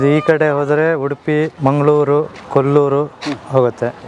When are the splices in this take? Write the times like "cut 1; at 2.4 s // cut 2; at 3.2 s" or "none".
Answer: cut 1; at 1.5 s